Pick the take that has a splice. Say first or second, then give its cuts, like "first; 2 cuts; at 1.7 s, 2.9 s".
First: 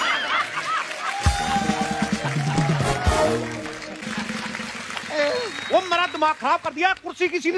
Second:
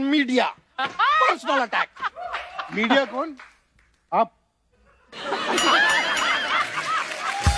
first; 1 cut; at 4.0 s